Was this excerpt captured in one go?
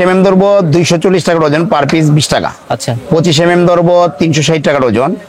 yes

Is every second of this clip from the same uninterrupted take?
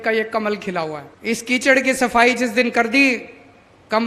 no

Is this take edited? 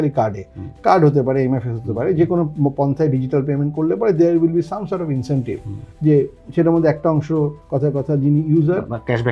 no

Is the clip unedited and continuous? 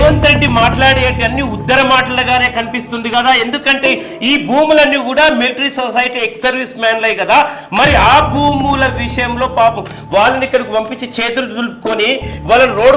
yes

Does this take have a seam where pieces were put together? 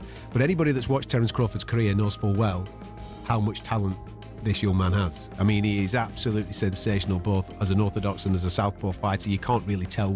no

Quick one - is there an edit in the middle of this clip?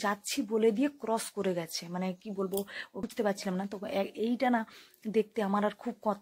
yes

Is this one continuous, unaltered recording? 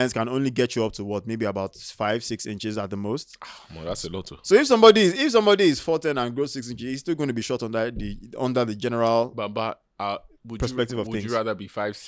yes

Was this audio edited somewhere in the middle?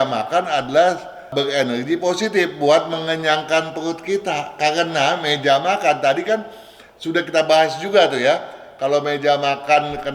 no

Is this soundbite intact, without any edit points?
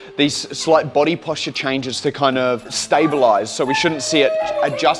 no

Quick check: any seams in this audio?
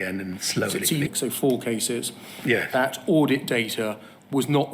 yes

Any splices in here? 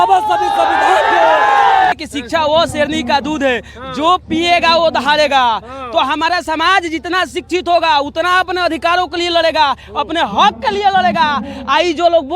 yes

